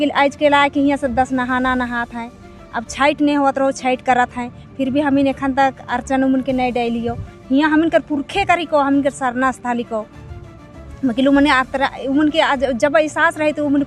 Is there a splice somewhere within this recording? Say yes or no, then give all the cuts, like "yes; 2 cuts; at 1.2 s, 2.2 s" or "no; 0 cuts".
no; 0 cuts